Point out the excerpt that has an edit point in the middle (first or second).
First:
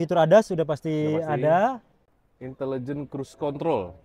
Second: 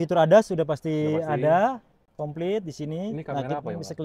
first